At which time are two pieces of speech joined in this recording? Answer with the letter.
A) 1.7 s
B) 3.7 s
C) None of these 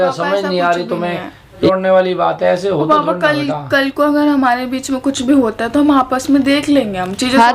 A